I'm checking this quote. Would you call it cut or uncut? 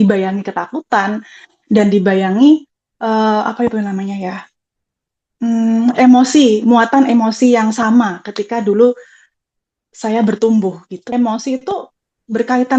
cut